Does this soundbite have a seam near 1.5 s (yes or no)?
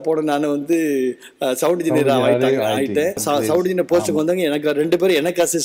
no